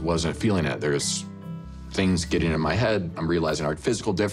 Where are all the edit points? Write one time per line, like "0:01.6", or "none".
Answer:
none